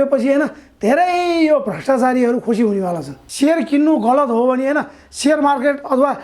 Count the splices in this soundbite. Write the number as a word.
one